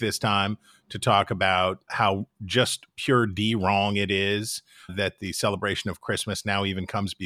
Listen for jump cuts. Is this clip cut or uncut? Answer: cut